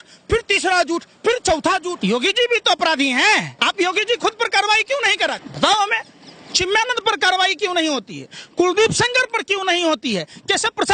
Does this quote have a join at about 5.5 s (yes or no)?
yes